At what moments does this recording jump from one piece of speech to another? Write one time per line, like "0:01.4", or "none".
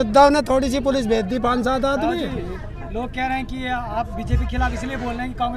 none